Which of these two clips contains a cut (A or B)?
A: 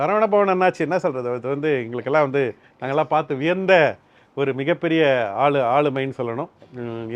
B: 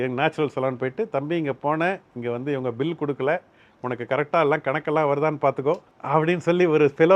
B